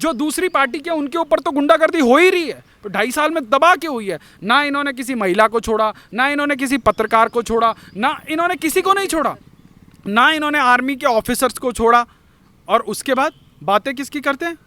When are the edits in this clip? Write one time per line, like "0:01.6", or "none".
none

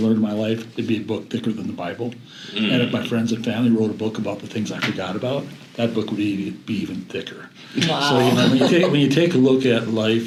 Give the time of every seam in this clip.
none

